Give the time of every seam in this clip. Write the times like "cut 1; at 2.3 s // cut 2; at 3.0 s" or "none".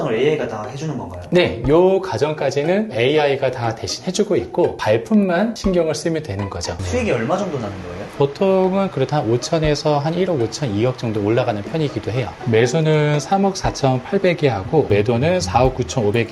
cut 1; at 4.8 s // cut 2; at 6.7 s // cut 3; at 8.1 s // cut 4; at 12.3 s